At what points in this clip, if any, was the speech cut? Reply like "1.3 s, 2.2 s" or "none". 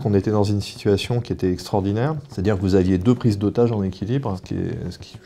2.3 s